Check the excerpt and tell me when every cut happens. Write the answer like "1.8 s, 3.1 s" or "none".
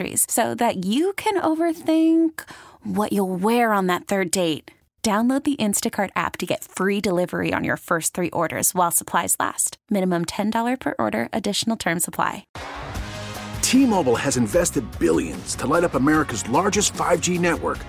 12.5 s